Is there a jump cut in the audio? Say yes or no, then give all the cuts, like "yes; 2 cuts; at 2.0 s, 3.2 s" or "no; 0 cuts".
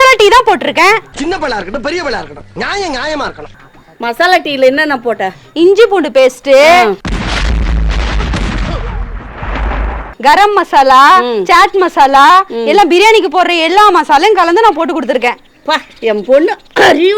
no; 0 cuts